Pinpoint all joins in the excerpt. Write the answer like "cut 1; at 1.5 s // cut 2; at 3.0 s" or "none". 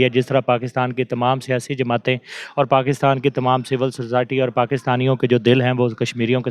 none